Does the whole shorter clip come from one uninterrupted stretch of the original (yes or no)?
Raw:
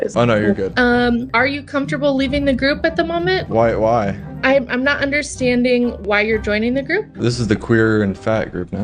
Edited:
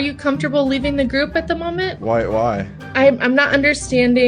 yes